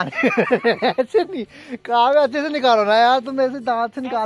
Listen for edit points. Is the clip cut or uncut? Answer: uncut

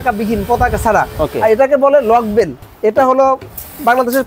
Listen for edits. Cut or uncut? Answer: cut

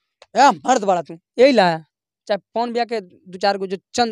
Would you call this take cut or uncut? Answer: uncut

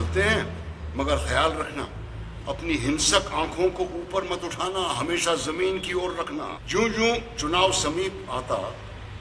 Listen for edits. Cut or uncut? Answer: cut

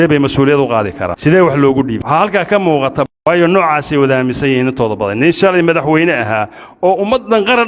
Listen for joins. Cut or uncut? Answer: cut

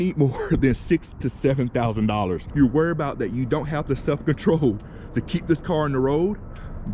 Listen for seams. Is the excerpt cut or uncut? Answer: cut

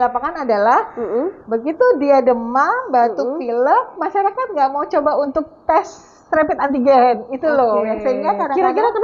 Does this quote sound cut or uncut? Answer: uncut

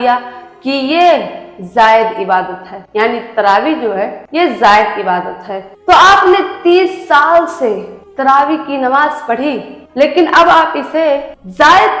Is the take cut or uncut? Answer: uncut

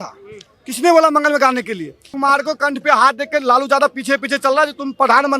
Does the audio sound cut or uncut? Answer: cut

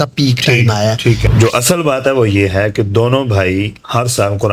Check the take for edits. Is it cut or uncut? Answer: cut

